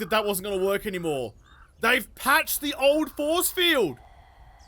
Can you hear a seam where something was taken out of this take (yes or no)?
no